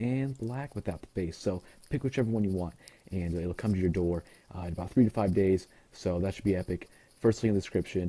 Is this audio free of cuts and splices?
no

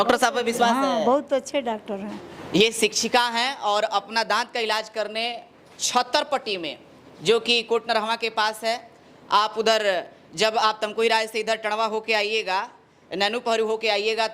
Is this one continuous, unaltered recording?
yes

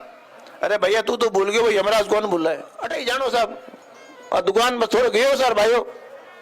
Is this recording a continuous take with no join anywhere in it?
no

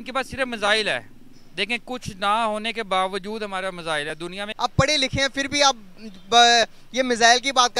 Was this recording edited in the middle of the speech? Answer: yes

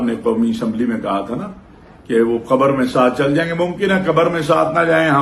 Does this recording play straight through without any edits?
yes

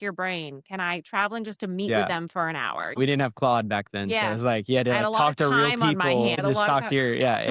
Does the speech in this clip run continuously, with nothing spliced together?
yes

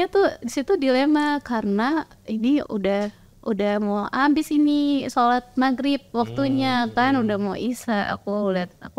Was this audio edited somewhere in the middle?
no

